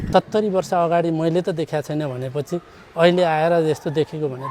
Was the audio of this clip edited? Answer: no; 0 cuts

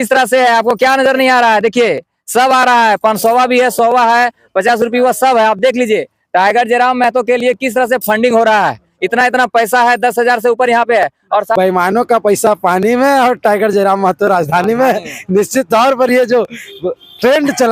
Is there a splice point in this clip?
yes; 1 cut; at 11.5 s

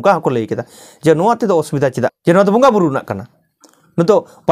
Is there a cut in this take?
yes; 1 cut; at 2.2 s

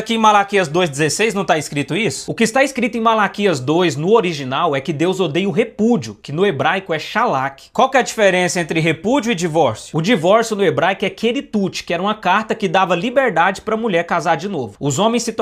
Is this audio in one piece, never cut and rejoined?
yes; 0 cuts

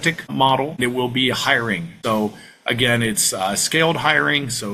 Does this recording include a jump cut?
no; 0 cuts

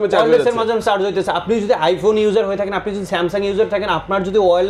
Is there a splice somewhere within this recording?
no; 0 cuts

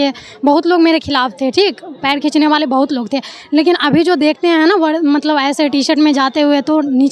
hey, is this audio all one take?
yes; 0 cuts

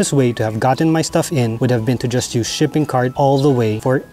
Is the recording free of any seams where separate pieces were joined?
yes; 0 cuts

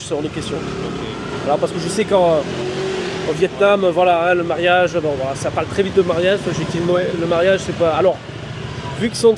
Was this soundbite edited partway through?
no; 0 cuts

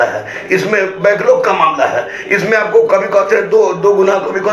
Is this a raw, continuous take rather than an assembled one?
yes; 0 cuts

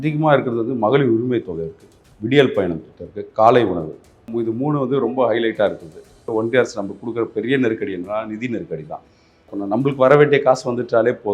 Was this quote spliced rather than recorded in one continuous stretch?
yes; 3 cuts; at 4.3 s, 6.3 s, 9.5 s

